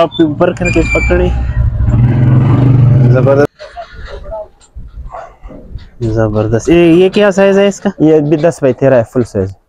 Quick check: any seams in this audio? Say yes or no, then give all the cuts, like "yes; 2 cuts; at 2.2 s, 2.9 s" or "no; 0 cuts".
yes; 1 cut; at 3.5 s